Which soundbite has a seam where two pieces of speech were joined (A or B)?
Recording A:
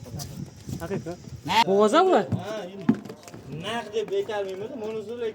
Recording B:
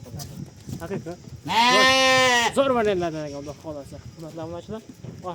A